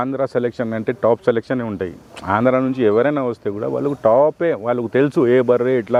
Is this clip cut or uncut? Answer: uncut